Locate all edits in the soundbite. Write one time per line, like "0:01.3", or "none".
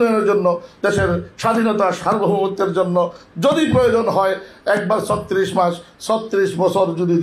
none